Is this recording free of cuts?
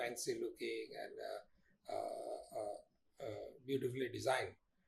yes; 0 cuts

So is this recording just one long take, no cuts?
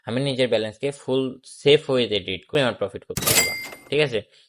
no; 1 cut; at 2.5 s

